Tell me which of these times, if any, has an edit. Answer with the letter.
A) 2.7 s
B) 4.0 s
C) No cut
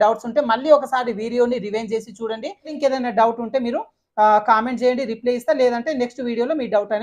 A